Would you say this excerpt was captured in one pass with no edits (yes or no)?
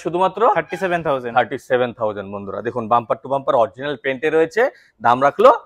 yes